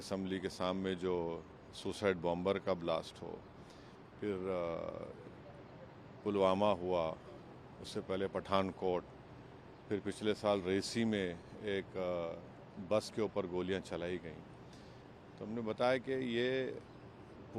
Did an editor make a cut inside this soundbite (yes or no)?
no